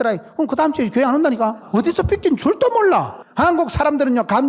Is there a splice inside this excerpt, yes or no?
yes